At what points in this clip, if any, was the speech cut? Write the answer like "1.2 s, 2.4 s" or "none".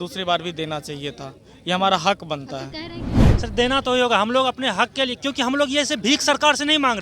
3.3 s